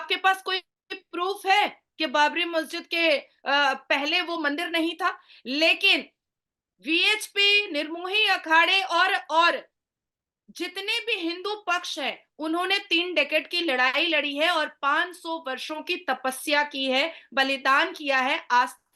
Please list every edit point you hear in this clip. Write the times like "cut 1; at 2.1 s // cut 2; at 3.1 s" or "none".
none